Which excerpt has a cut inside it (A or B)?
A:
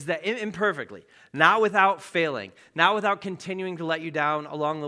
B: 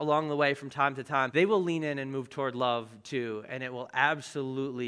B